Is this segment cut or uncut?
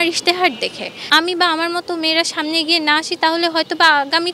cut